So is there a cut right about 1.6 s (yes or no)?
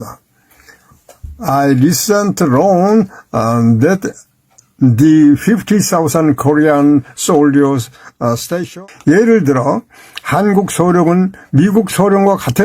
no